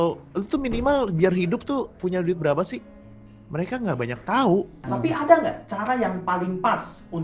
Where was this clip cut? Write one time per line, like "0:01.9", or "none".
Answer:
0:04.8